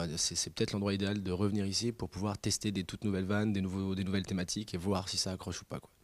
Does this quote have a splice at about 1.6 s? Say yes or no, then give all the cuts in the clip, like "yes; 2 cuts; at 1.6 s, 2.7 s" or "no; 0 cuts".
yes; 1 cut; at 1.6 s